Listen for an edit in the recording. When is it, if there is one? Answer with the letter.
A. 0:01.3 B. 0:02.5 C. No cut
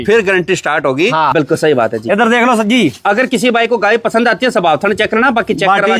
A